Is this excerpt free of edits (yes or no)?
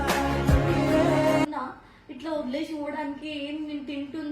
no